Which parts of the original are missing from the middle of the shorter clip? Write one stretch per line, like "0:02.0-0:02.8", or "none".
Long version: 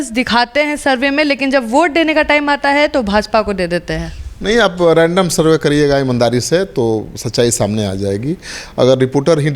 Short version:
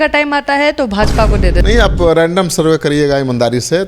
0:03.8-0:04.4